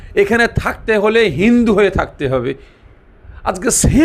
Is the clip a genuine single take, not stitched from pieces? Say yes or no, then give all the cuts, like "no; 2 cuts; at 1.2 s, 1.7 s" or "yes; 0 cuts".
yes; 0 cuts